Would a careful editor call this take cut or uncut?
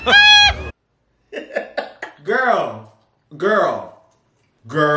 cut